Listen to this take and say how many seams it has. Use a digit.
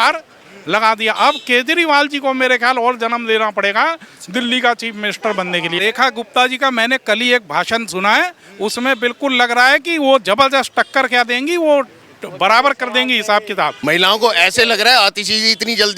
2